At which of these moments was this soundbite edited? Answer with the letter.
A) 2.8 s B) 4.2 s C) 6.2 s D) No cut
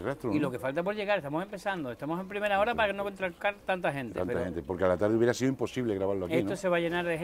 D